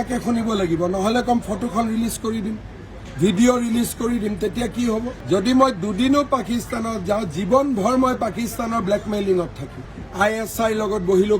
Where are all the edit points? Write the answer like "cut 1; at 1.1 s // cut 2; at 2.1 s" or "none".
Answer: cut 1; at 5.1 s // cut 2; at 9.8 s